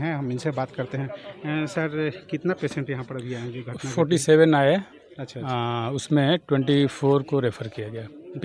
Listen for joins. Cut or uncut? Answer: uncut